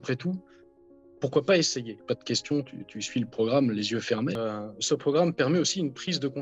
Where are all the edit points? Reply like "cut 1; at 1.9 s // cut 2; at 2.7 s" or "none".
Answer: cut 1; at 2.0 s // cut 2; at 4.4 s